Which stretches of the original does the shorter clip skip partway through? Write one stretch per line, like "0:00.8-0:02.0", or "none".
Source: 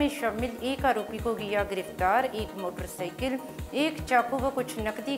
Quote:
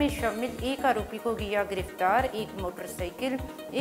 none